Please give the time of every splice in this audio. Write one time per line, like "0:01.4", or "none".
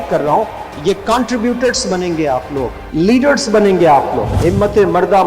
0:02.8
0:04.3